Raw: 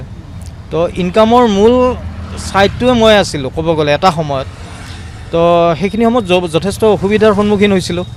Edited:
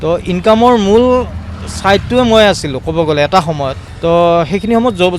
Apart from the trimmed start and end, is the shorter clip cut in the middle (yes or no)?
yes